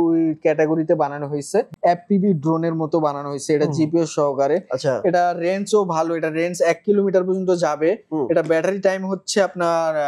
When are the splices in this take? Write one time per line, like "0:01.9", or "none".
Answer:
0:01.7